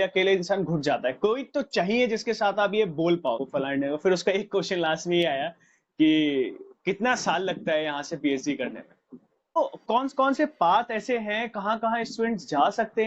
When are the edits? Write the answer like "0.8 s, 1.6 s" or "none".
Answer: 3.6 s, 9.6 s